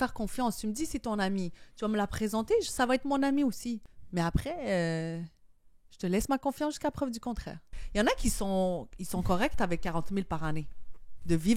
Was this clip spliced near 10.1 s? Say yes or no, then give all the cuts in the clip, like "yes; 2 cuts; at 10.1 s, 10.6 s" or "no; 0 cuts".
no; 2 cuts; at 3.9 s, 7.8 s